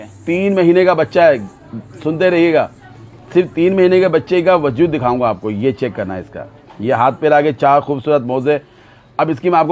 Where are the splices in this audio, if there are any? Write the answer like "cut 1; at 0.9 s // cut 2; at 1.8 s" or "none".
none